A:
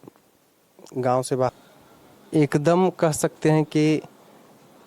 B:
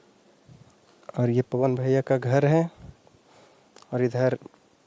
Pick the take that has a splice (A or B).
A